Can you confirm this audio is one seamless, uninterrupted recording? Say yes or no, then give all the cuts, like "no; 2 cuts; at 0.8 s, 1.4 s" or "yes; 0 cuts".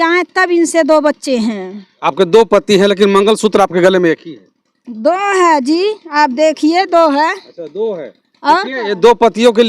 no; 1 cut; at 1.9 s